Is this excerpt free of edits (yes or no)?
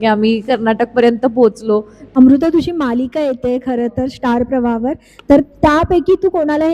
no